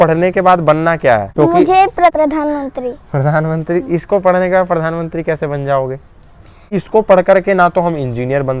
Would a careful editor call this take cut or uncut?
cut